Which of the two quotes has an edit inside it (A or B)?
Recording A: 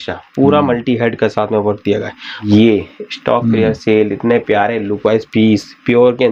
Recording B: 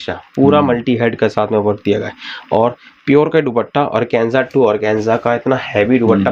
A